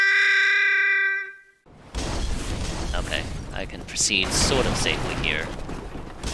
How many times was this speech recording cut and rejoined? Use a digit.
1